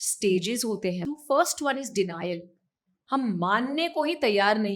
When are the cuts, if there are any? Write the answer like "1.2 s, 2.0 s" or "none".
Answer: 1.0 s